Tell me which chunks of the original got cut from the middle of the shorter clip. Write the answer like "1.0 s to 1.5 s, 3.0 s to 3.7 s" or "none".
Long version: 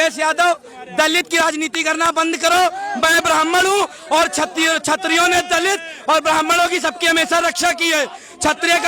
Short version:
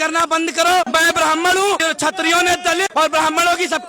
2.7 s to 3.0 s, 3.9 s to 4.7 s, 5.7 s to 6.0 s